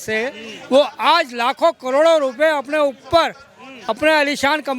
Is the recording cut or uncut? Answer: uncut